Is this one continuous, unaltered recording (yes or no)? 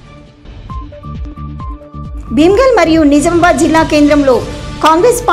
no